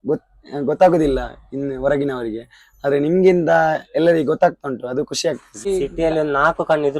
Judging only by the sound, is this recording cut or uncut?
cut